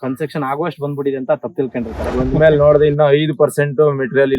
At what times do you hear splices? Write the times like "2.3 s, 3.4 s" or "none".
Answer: 2.1 s